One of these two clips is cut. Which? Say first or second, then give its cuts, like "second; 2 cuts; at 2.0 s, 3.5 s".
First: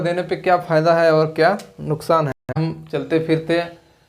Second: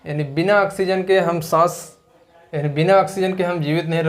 first; 1 cut; at 2.6 s